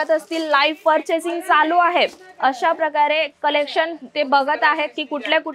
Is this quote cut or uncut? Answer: uncut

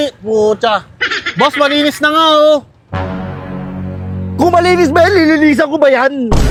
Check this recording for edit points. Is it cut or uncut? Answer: uncut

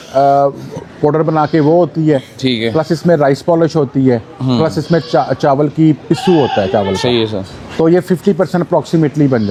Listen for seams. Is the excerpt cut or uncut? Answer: uncut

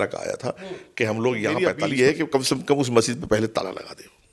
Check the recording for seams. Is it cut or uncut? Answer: cut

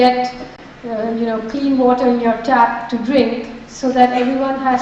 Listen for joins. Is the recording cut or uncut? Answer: cut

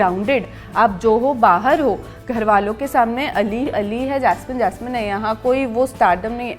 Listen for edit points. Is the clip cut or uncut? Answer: uncut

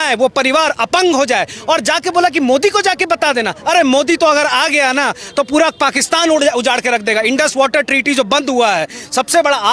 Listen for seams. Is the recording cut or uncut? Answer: uncut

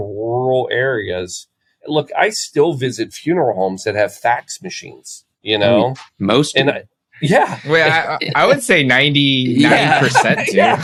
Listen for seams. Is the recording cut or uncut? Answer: uncut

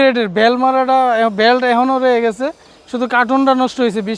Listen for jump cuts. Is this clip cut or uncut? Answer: uncut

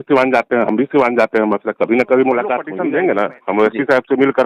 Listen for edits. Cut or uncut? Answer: cut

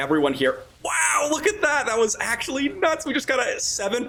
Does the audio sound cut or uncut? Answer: uncut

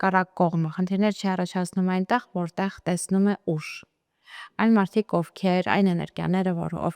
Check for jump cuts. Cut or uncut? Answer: uncut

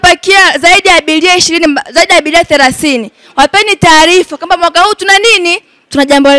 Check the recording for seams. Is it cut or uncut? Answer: uncut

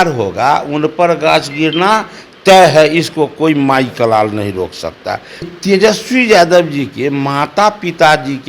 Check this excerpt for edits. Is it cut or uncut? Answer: cut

